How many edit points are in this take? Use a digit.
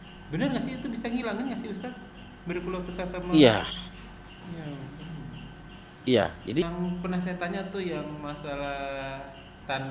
1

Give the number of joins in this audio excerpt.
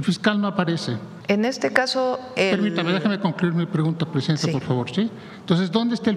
1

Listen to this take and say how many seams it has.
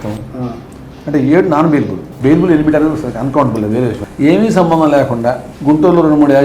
2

